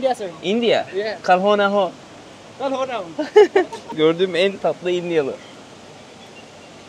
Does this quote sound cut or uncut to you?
uncut